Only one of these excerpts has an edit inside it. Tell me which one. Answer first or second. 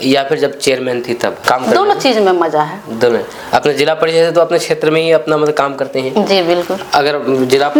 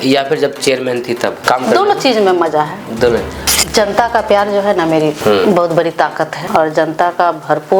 second